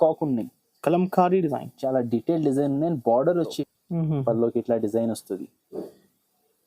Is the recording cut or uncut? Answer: cut